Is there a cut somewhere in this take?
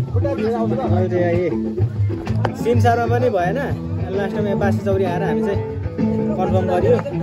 no; 0 cuts

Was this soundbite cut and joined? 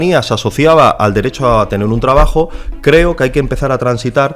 no; 0 cuts

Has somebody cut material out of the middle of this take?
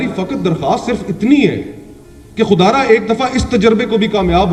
no; 0 cuts

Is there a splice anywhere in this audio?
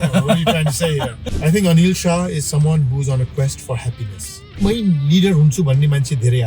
yes; 2 cuts; at 1.2 s, 4.6 s

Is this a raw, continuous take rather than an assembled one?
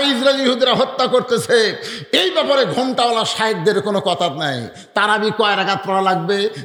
yes; 0 cuts

